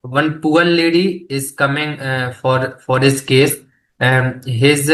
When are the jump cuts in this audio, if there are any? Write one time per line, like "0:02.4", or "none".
none